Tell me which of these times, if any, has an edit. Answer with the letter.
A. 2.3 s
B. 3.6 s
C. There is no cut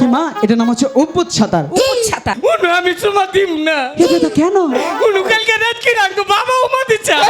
A